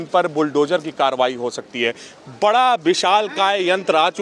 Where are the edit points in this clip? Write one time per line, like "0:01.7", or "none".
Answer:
none